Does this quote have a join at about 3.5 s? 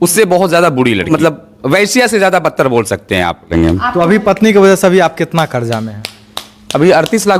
yes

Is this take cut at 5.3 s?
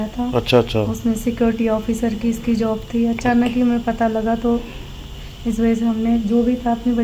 no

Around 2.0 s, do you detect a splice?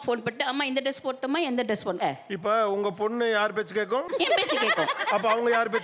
yes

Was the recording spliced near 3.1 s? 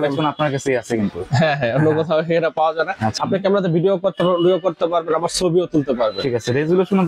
yes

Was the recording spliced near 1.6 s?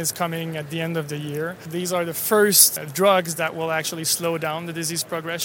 yes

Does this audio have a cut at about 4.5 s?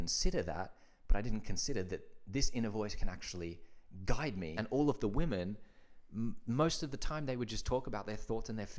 yes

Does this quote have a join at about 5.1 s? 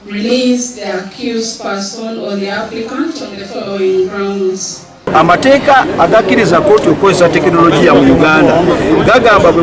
yes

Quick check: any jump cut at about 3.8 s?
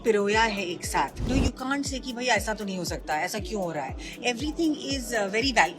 no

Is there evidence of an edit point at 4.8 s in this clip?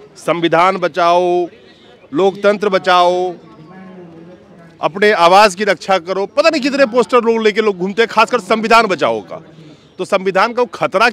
no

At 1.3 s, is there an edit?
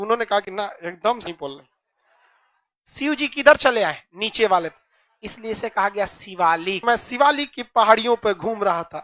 yes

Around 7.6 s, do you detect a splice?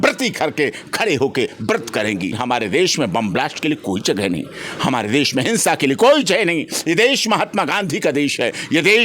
no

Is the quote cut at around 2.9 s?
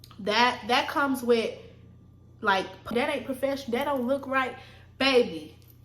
yes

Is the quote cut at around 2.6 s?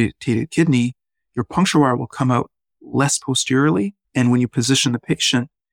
no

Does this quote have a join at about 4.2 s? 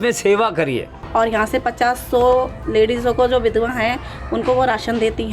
no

